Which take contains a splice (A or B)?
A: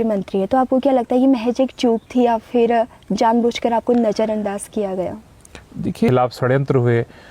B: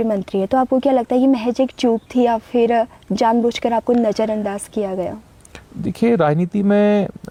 A